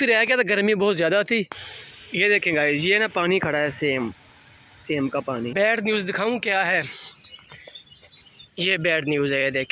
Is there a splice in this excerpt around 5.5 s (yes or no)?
yes